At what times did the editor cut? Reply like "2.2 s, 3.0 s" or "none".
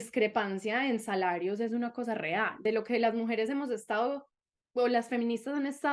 2.6 s